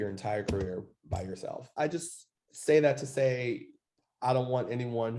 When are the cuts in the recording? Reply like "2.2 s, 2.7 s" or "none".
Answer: none